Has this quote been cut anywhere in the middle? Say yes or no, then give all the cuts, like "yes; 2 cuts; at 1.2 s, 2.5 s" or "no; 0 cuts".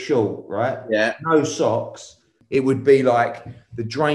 yes; 1 cut; at 2.3 s